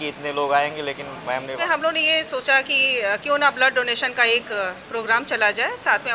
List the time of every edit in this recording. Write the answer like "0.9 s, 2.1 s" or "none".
1.5 s